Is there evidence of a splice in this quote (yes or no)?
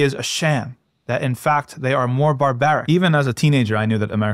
yes